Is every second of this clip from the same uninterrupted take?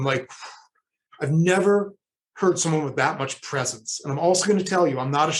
yes; 0 cuts

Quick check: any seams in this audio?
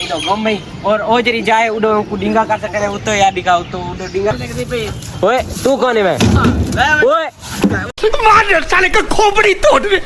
yes; 2 cuts; at 4.3 s, 7.9 s

